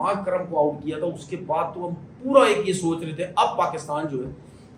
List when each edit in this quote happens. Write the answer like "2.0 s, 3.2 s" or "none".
none